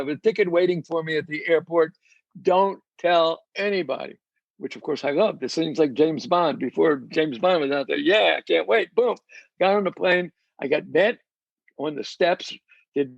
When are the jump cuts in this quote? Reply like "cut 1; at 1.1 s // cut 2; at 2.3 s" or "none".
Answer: none